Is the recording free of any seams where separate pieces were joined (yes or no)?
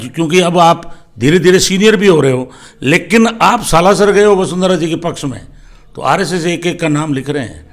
yes